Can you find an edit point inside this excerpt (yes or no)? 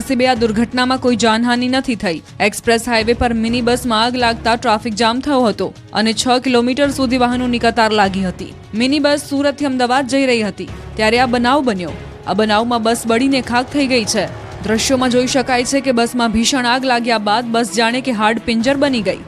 yes